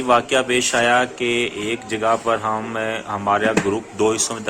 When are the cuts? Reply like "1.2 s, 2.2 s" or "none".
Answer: none